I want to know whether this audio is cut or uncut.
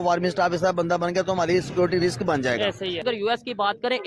cut